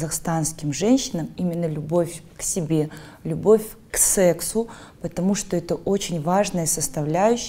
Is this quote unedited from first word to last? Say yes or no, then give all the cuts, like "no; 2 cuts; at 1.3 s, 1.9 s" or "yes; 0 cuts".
yes; 0 cuts